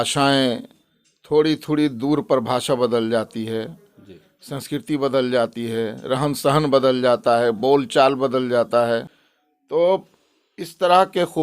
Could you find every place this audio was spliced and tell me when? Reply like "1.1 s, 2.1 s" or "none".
9.1 s